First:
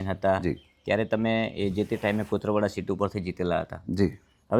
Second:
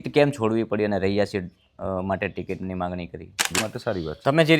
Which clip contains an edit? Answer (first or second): second